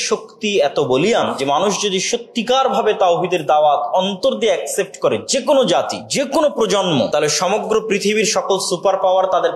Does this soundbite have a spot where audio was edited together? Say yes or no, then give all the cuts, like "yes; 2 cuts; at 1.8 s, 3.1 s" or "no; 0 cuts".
yes; 3 cuts; at 1.2 s, 6.0 s, 7.1 s